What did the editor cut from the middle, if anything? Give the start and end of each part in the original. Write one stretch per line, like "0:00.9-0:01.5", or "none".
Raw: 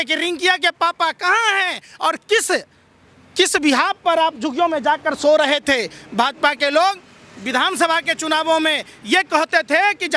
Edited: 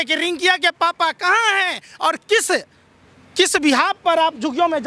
none